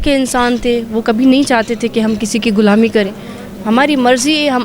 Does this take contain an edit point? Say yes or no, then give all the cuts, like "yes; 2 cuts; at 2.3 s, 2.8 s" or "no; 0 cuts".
no; 0 cuts